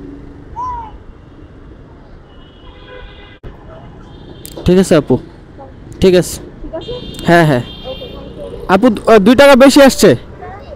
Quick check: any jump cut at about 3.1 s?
yes; 1 cut; at 3.1 s

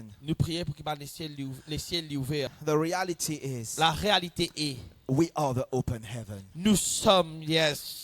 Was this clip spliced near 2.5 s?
yes; 1 cut; at 2.5 s

